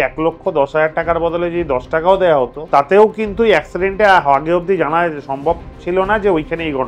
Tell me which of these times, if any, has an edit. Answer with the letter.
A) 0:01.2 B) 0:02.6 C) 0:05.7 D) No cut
B